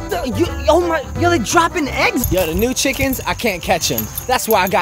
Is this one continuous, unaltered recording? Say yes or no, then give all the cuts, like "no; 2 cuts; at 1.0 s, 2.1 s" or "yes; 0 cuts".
no; 1 cut; at 2.2 s